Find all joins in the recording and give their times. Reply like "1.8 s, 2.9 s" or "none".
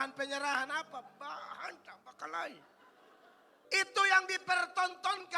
3.5 s